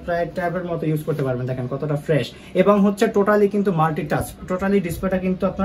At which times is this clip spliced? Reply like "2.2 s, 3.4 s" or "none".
none